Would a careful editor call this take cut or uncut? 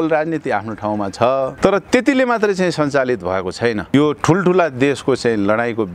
cut